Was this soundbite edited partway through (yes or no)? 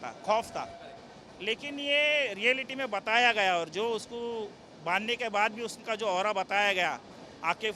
no